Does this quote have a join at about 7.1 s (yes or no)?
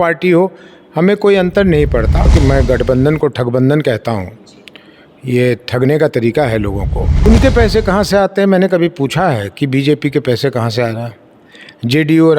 yes